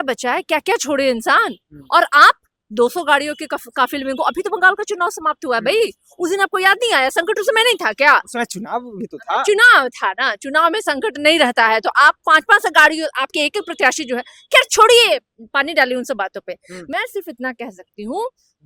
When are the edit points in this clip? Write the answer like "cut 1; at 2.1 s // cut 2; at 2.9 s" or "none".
none